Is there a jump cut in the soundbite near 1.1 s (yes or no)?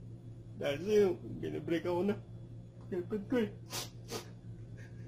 no